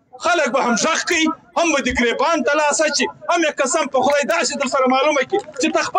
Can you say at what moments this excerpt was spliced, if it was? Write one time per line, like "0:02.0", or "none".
none